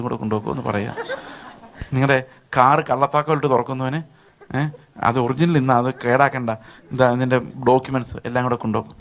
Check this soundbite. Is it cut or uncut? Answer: uncut